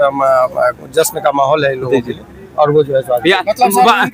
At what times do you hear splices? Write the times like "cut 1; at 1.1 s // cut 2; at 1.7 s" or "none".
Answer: none